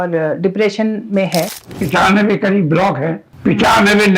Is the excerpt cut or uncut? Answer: cut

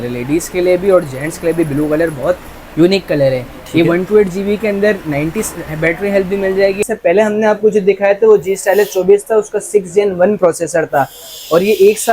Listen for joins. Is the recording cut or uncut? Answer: cut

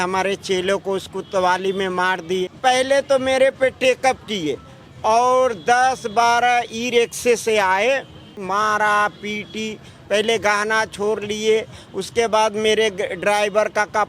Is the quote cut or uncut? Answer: cut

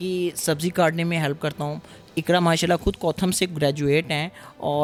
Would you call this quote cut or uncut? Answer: uncut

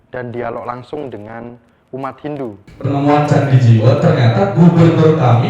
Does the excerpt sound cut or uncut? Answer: cut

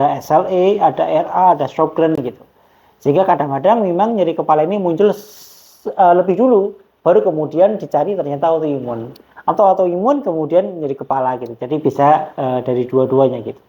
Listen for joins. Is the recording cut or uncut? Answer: uncut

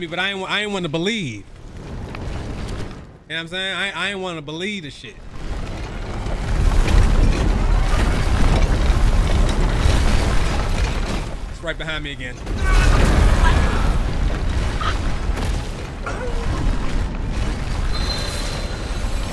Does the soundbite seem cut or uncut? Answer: uncut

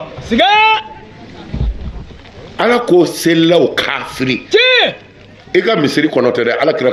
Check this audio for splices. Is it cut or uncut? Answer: uncut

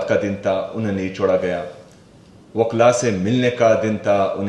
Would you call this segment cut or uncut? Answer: uncut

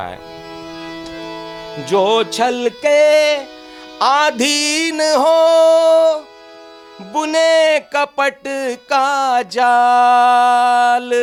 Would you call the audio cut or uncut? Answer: uncut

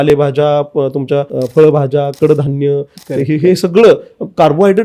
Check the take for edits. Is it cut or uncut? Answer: cut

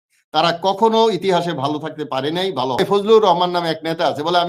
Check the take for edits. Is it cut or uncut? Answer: cut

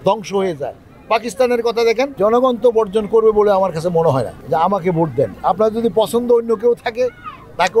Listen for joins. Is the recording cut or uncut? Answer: cut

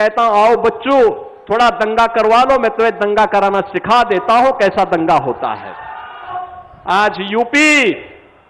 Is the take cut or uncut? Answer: cut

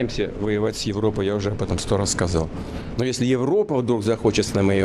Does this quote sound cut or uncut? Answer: uncut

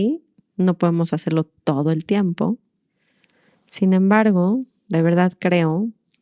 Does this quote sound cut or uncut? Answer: uncut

